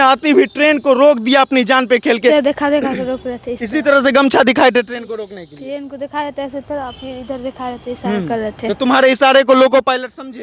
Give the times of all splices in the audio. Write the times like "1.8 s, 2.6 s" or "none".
2.3 s